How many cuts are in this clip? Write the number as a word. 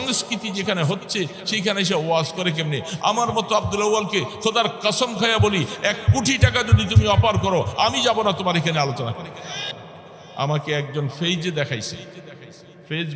one